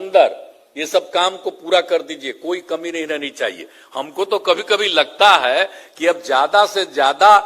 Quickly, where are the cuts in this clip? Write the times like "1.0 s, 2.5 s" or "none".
none

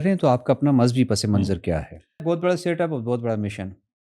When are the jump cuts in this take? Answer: 2.2 s

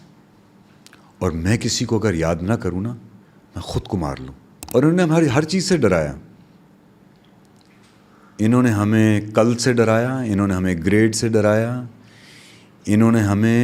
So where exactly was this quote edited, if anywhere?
4.5 s

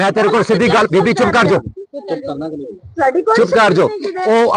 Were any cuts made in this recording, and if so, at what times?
none

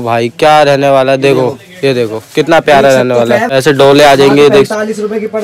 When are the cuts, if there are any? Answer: 3.5 s

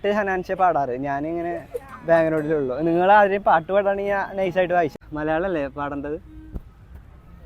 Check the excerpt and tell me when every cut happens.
5.0 s

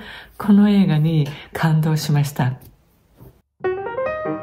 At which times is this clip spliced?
3.5 s

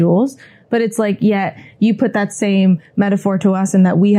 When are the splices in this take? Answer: none

